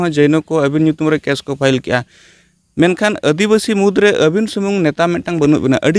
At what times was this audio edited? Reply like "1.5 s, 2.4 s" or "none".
none